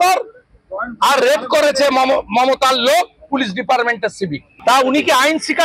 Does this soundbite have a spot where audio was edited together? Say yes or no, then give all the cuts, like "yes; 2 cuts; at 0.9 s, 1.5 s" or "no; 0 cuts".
yes; 1 cut; at 4.5 s